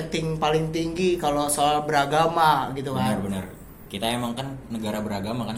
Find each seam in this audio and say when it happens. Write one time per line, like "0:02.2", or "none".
none